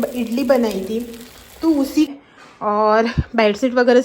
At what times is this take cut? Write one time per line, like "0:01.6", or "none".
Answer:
0:02.1

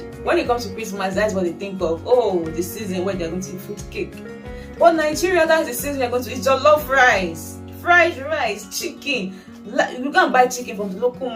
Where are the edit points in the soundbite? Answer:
none

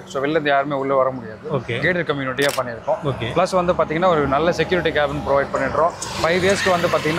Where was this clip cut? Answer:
none

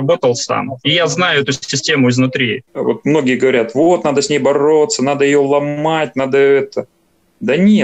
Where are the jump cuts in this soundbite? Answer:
0:02.6

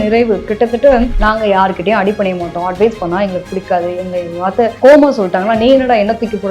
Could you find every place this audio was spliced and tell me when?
0:01.1

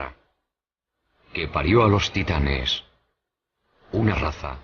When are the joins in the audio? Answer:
0:01.6

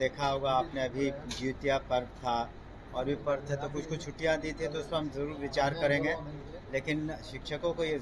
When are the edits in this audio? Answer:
none

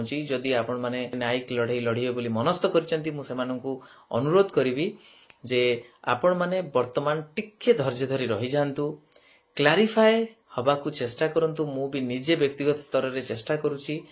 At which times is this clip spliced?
0:01.2

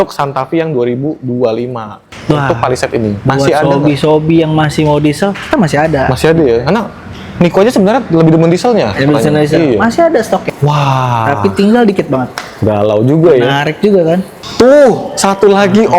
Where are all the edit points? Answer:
0:02.1
0:10.5
0:14.3

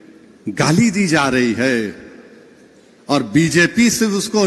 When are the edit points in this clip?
none

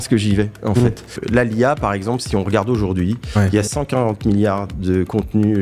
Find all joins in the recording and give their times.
0:01.1

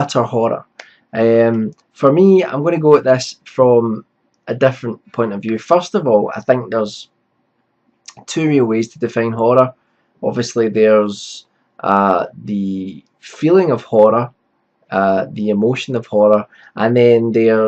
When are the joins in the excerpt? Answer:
none

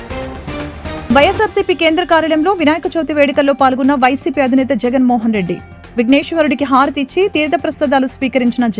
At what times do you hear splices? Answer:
0:01.0

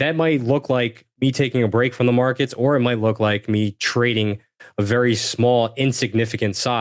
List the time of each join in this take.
none

